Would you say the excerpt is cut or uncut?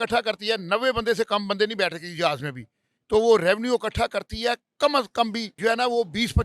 cut